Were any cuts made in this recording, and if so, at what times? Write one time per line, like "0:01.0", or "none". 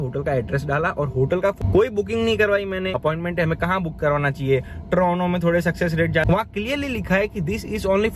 0:01.6
0:03.0
0:06.2

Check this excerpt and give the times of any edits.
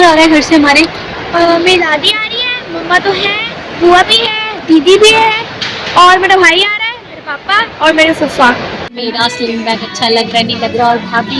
0:09.0

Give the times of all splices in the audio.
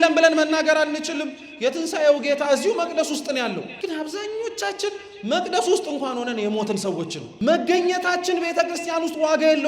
0:03.7
0:07.2

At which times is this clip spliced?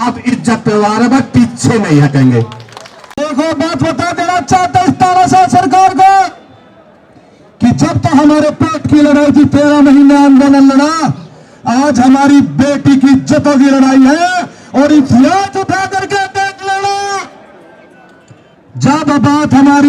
0:03.2

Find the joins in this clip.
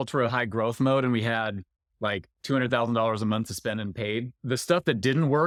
none

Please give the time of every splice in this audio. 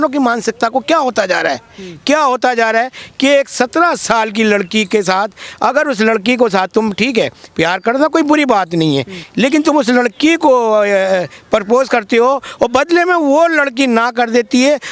none

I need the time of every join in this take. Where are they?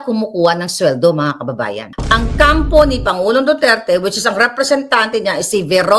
0:01.9

